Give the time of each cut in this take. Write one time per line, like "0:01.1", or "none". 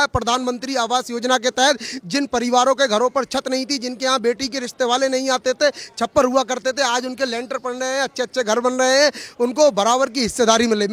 none